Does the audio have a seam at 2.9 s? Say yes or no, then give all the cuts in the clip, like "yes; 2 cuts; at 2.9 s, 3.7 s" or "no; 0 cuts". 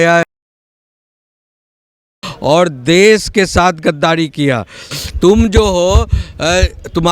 no; 1 cut; at 4.9 s